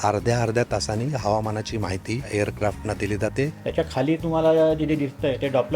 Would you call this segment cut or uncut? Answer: cut